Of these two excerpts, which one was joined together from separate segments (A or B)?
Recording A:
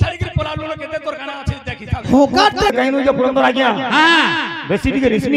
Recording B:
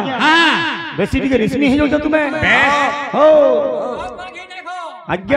A